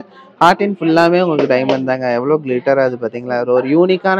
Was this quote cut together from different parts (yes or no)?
no